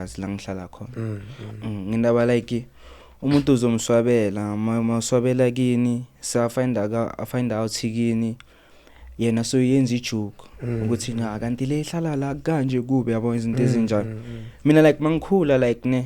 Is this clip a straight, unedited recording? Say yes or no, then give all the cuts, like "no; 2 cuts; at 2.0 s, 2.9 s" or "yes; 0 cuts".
yes; 0 cuts